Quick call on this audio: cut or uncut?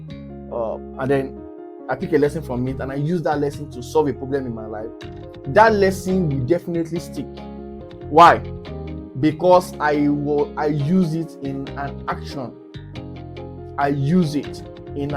cut